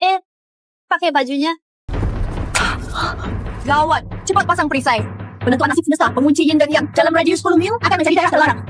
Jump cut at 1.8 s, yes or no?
yes